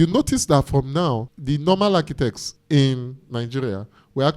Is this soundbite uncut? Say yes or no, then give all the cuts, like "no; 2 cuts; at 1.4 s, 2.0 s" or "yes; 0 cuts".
no; 2 cuts; at 1.3 s, 2.5 s